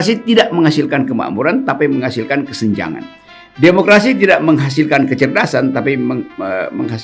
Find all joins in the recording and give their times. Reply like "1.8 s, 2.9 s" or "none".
none